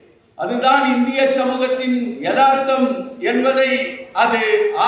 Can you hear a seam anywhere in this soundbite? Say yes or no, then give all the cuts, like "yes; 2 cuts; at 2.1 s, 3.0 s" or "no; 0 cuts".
no; 0 cuts